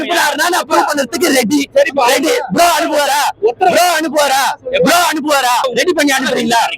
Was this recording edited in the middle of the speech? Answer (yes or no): yes